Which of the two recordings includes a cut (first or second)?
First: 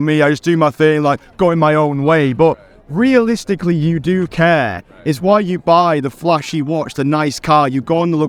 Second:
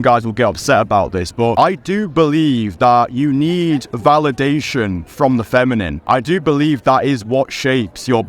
second